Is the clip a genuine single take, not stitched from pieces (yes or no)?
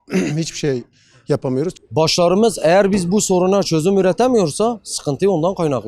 no